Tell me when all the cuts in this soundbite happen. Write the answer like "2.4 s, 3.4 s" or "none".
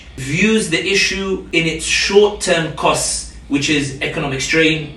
1.5 s

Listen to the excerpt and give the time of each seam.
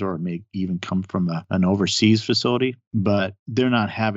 1.4 s, 2.8 s

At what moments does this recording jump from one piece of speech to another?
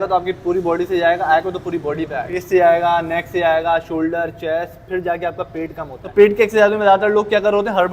2.4 s, 5.9 s

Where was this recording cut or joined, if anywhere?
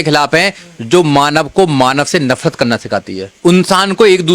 3.3 s

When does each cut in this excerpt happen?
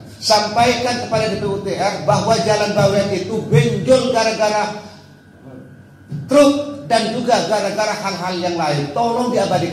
none

